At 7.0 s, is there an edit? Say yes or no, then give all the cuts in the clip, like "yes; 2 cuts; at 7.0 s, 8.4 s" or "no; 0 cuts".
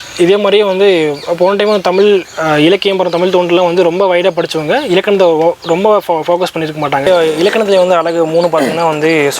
yes; 1 cut; at 7.0 s